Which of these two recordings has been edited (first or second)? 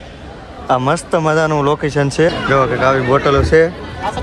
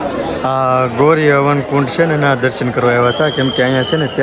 first